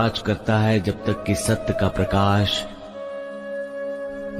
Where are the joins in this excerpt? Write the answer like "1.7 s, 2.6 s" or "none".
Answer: none